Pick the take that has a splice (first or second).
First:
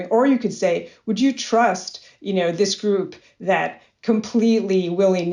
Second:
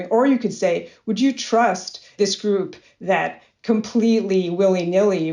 second